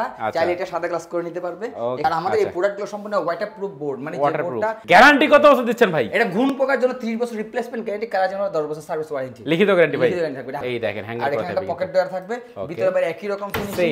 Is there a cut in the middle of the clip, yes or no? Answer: yes